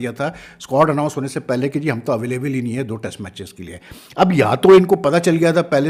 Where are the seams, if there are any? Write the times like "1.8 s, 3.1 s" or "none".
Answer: none